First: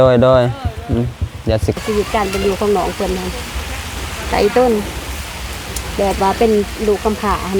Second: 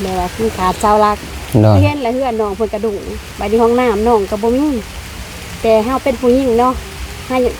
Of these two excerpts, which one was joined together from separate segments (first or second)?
first